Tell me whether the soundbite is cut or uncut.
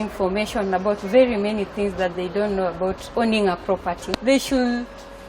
cut